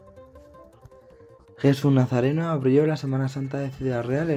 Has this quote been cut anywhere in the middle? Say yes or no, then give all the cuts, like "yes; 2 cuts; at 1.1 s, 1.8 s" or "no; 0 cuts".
no; 0 cuts